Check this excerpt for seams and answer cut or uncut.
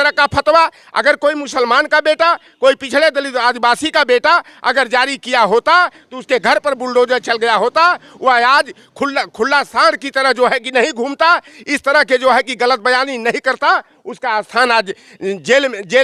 uncut